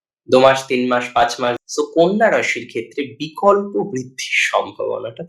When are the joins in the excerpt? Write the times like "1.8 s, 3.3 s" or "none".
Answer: 1.6 s